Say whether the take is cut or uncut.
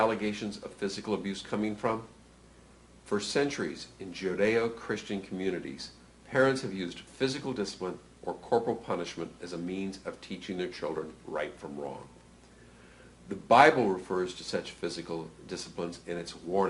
uncut